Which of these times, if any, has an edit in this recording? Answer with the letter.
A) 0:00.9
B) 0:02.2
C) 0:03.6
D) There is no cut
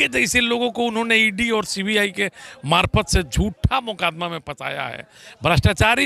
D